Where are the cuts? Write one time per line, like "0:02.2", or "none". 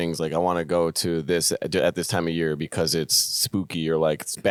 none